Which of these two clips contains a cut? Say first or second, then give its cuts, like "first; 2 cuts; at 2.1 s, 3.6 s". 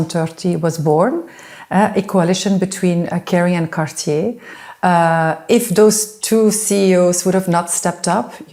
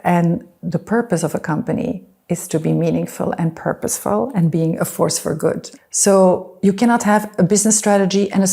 second; 1 cut; at 5.7 s